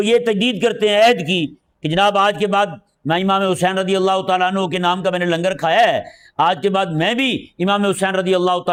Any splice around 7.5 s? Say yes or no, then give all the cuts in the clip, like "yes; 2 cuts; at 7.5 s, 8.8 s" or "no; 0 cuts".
no; 0 cuts